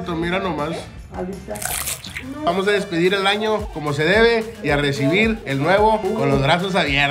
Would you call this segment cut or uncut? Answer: cut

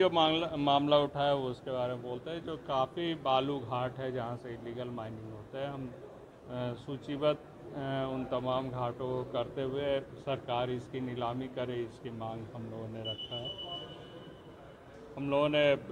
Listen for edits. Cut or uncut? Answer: uncut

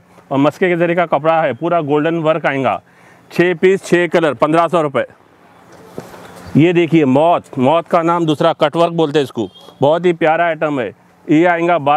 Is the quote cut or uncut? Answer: uncut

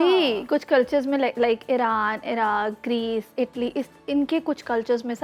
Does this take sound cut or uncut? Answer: uncut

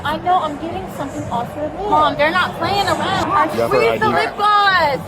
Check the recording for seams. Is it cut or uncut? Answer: cut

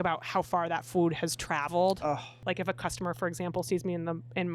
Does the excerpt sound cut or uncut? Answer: cut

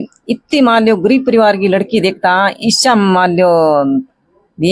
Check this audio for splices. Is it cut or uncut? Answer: uncut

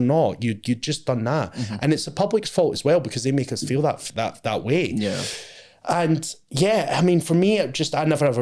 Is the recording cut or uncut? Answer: uncut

